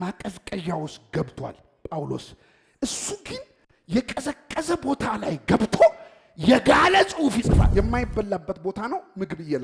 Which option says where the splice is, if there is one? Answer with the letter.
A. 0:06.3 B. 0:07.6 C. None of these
B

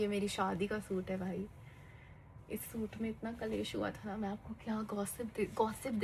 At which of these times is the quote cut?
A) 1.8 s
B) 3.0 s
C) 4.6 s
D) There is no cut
D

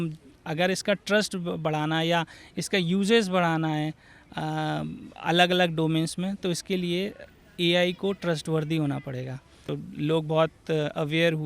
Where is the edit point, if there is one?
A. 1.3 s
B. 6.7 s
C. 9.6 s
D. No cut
C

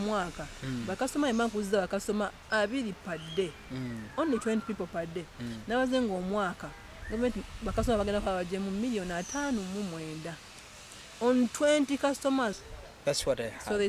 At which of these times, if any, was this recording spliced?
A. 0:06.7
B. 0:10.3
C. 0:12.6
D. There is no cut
C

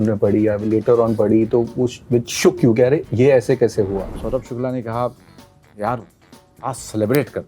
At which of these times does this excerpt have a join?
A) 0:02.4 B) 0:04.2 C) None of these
B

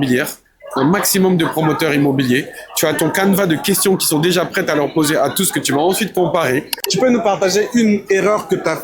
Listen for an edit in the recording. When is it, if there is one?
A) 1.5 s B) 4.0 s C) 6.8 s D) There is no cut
C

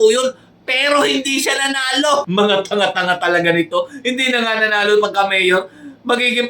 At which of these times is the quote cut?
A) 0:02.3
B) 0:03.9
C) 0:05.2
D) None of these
A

